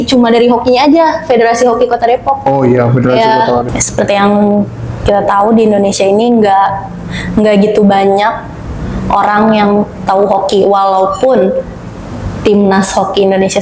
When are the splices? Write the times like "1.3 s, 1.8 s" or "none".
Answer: 3.7 s